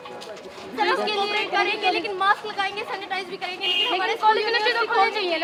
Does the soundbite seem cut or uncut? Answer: uncut